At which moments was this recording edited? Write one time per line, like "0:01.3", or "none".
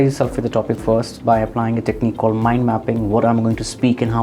none